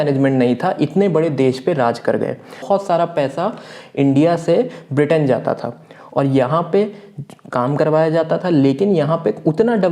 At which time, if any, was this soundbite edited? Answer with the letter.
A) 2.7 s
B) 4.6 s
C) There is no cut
A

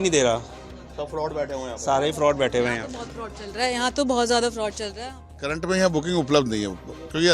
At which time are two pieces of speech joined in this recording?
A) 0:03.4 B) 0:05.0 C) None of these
B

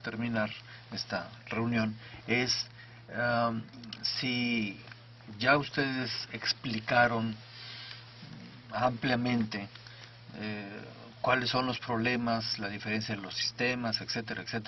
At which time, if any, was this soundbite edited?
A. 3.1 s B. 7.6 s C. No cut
A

